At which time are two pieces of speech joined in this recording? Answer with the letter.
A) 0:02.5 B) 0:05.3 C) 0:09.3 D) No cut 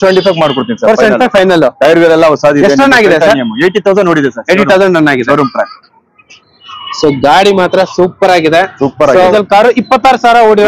C